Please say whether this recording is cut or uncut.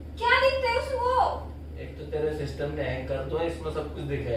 uncut